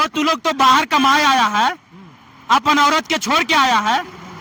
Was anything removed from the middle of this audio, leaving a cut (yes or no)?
no